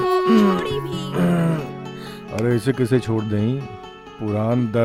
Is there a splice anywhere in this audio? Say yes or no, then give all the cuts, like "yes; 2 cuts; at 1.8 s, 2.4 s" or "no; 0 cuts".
no; 0 cuts